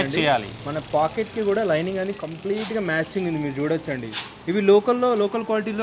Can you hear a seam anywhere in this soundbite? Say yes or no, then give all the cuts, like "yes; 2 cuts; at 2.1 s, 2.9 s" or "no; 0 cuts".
no; 0 cuts